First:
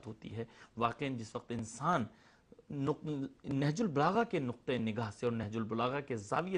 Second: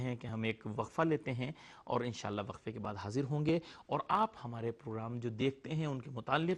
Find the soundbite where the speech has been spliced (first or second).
first